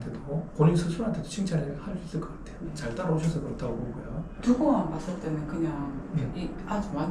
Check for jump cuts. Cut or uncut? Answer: uncut